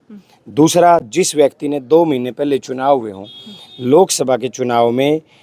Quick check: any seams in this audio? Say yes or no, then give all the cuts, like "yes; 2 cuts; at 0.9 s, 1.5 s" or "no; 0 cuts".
no; 0 cuts